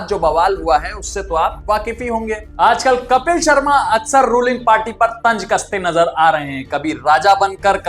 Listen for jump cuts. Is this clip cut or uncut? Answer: cut